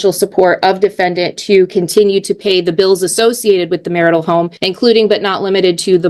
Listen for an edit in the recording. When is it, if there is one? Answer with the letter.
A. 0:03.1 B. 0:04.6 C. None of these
B